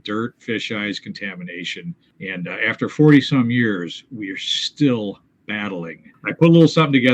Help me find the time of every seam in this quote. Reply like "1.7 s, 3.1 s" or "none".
2.1 s, 6.1 s